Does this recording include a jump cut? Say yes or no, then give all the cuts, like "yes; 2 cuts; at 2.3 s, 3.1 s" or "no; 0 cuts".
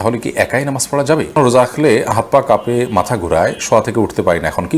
yes; 1 cut; at 1.4 s